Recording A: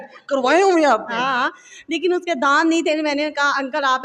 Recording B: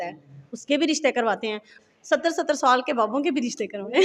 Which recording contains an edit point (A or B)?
B